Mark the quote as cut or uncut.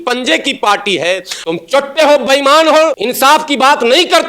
cut